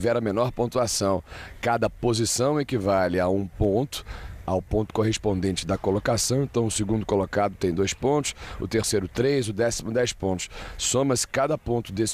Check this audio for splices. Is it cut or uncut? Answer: cut